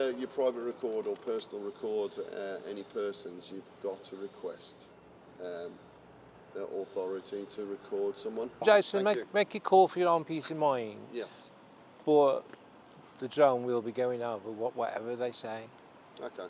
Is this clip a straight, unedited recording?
no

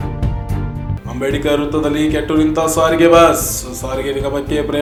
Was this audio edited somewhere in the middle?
no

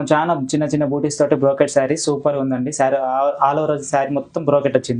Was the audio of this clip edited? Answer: no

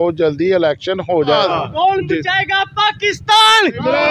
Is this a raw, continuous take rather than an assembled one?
no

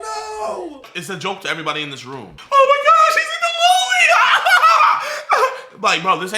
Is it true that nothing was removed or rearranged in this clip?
no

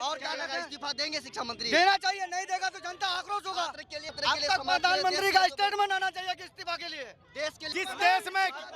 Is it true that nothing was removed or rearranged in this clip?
no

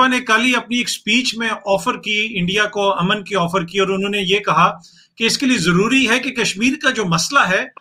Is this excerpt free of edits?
yes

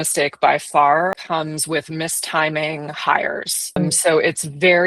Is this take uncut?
no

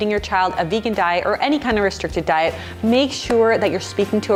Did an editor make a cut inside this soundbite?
no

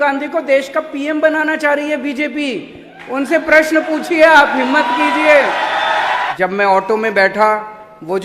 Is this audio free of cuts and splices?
no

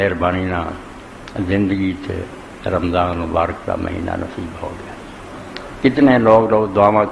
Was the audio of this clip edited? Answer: yes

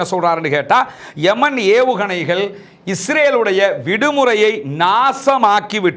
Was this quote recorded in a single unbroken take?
yes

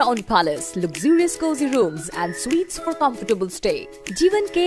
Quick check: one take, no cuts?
yes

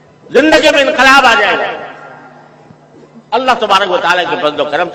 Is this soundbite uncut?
yes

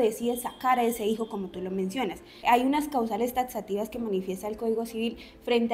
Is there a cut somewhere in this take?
yes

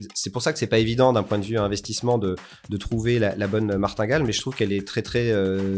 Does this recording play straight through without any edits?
yes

